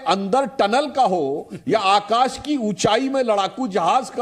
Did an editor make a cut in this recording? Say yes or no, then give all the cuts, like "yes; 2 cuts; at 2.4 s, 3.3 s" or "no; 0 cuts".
no; 0 cuts